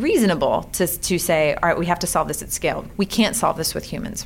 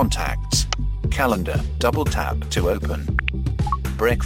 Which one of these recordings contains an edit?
first; 1 cut; at 2.9 s

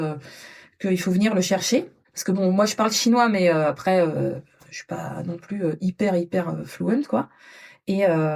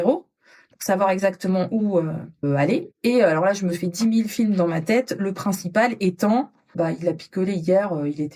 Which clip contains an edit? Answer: second; 2 cuts; at 2.4 s, 6.7 s

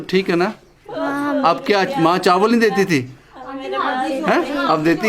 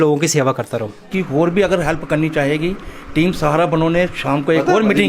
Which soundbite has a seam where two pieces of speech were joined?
second; 1 cut; at 1.1 s

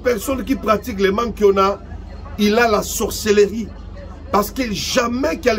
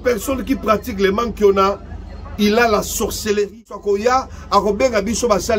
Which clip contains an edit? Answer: second; 1 cut; at 3.8 s

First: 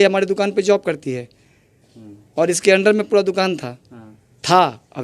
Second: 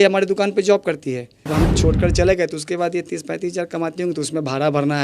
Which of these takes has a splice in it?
second; 1 cut; at 1.5 s

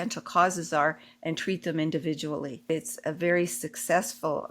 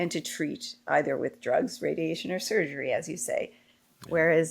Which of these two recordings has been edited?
first; 1 cut; at 2.7 s

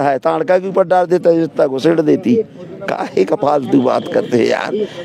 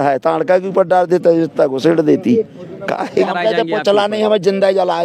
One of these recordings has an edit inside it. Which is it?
second; 1 cut; at 3.3 s

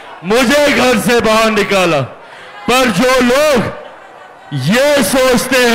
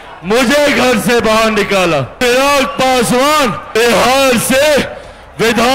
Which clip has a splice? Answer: second; 2 cuts; at 2.1 s, 3.6 s

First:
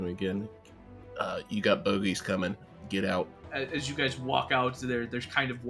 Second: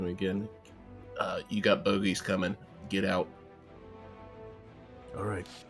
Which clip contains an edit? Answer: first; 1 cut; at 3.4 s

